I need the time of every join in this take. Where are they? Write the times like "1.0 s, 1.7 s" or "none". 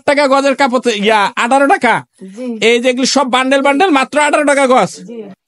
none